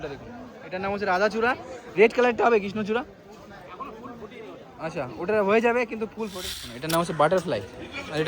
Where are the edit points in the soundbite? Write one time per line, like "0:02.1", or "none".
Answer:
0:06.7